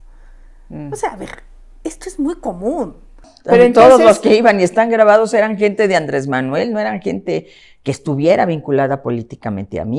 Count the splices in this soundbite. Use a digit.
1